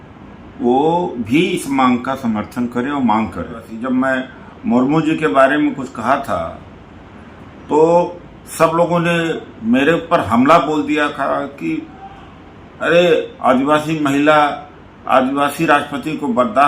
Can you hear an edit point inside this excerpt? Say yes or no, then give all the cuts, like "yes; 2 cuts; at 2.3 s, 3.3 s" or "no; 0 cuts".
yes; 1 cut; at 3.7 s